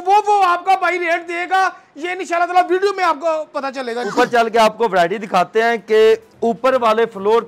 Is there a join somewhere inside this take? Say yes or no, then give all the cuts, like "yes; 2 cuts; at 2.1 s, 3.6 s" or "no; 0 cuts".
yes; 1 cut; at 4.0 s